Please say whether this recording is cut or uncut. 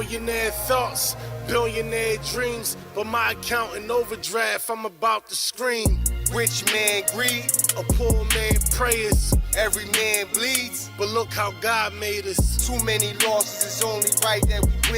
cut